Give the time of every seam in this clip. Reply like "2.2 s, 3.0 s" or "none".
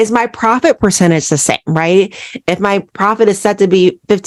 none